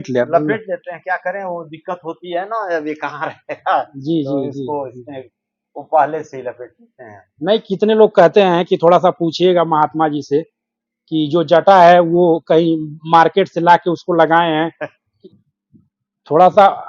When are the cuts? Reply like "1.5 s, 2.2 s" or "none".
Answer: 15.2 s